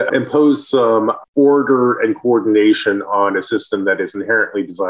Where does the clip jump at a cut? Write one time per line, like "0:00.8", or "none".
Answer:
none